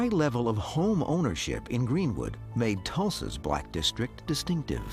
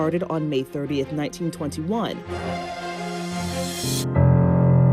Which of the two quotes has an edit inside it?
second; 1 cut; at 3.9 s

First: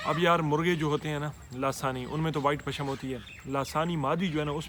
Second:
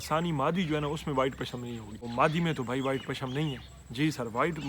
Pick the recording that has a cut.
second; 1 cut; at 2.0 s

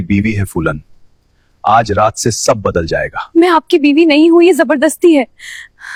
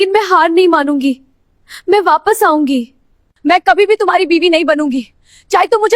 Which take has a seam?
second; 1 cut; at 3.3 s

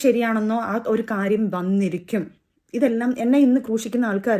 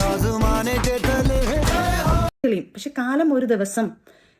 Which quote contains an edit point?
second; 1 cut; at 2.3 s

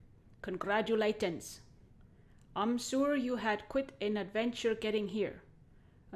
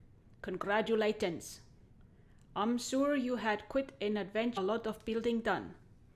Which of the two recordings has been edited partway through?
first; 1 cut; at 4.5 s

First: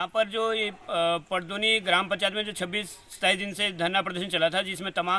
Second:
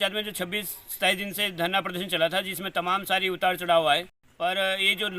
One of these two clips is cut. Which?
second; 1 cut; at 4.2 s

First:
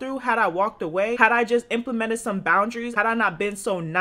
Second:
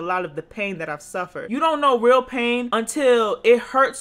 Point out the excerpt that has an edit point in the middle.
second; 2 cuts; at 1.4 s, 2.7 s

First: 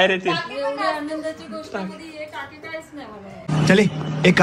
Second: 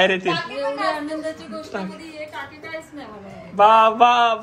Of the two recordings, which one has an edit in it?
second; 1 cut; at 3.5 s

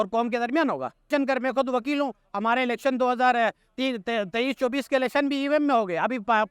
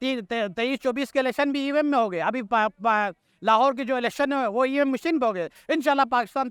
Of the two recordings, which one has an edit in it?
first; 1 cut; at 1.1 s

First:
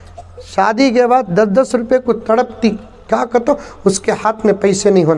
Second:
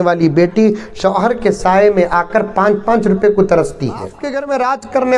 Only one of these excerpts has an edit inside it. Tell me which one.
second; 1 cut; at 4.2 s

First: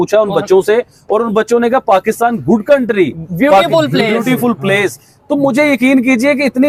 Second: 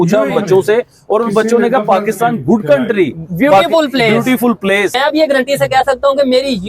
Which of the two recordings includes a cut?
second; 1 cut; at 4.9 s

